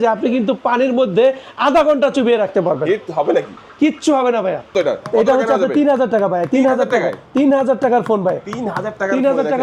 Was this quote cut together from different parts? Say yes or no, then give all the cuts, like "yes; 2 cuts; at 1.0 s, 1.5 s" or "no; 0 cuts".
yes; 1 cut; at 4.7 s